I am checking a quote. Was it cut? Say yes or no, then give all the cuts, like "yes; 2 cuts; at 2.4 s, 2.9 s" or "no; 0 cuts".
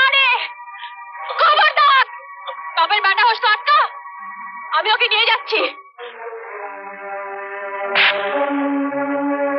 no; 0 cuts